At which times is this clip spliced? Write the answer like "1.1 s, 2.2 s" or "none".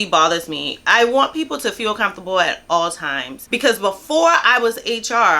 3.4 s